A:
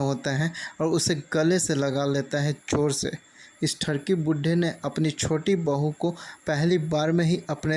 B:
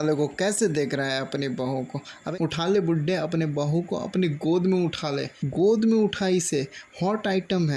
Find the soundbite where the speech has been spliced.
B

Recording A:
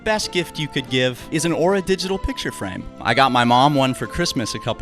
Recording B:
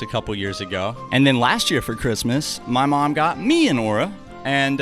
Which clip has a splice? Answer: A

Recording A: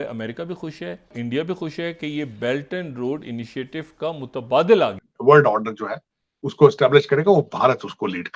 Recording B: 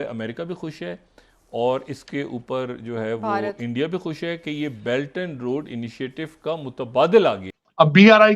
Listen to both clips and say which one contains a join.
A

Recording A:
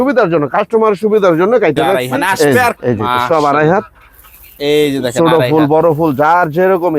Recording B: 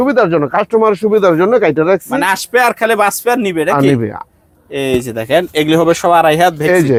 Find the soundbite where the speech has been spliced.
A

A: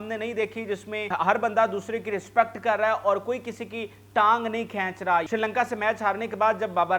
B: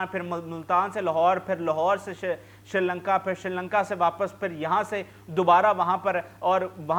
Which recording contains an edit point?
A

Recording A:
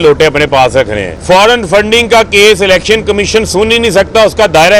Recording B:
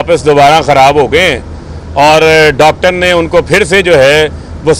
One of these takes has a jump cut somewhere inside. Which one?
A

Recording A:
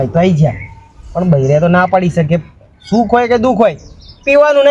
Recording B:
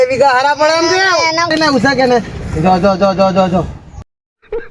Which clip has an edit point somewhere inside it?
B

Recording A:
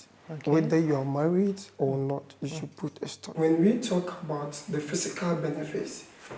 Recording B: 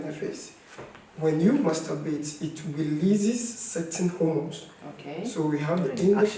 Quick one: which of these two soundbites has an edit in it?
A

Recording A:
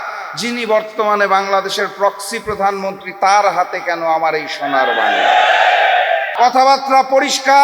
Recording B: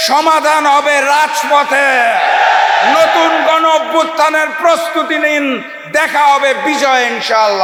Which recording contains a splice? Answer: A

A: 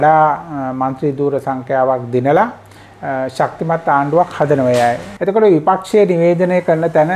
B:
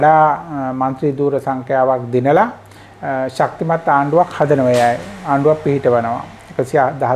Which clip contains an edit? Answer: A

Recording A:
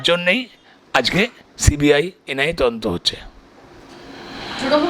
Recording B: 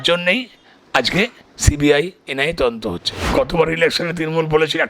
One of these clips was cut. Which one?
B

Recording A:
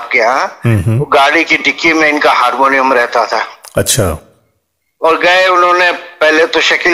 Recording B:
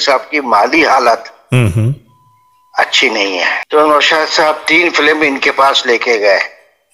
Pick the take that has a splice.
B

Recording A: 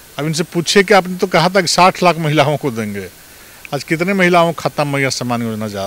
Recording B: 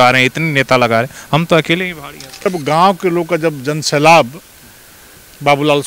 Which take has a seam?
B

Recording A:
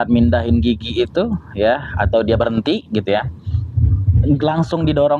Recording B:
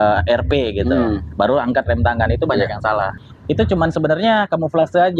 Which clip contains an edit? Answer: B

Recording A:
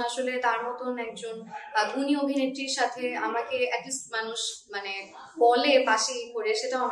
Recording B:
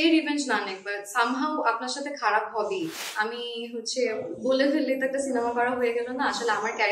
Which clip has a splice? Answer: B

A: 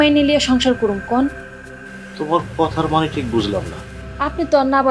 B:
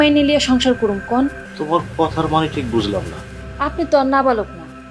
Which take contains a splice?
B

